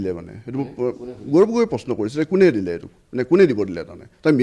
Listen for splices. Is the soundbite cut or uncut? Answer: uncut